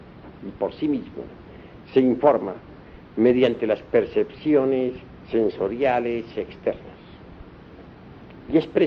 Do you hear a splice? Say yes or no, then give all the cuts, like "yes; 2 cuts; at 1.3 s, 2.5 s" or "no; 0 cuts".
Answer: no; 0 cuts